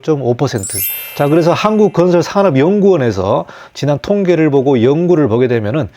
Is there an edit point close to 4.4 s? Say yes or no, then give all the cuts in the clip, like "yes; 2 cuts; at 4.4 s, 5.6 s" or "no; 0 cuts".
no; 1 cut; at 1.0 s